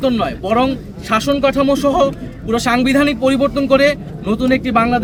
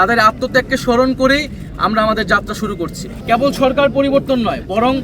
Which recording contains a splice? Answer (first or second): second